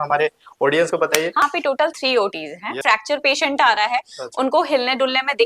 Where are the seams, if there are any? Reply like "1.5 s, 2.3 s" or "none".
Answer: 1.4 s, 2.8 s